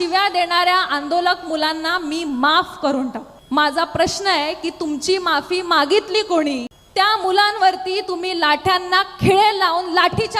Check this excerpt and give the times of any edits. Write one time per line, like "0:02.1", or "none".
0:03.3
0:06.8